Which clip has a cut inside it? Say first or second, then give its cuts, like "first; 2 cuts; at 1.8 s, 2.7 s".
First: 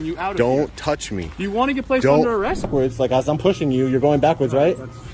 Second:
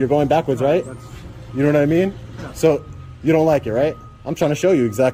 first; 1 cut; at 2.7 s